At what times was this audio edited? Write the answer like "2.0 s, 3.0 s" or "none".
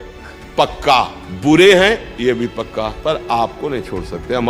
1.2 s, 3.0 s

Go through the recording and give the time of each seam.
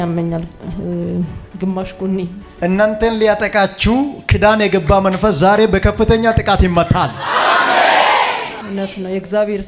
2.4 s, 8.6 s

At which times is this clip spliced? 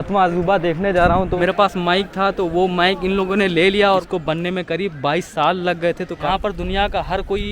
1.3 s, 4.0 s, 6.2 s

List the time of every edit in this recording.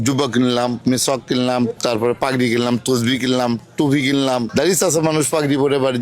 none

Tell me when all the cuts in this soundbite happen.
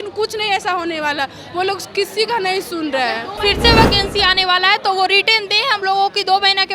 3.4 s

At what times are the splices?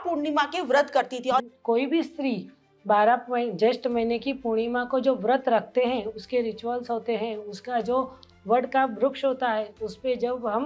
1.5 s

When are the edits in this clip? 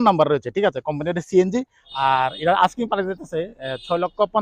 1.8 s

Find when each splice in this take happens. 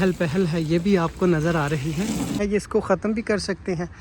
2.4 s

